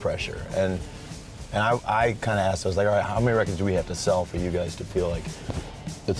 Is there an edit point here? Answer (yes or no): yes